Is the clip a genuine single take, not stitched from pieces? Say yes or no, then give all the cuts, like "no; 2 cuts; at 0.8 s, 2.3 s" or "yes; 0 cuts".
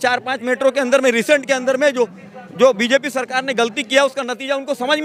yes; 0 cuts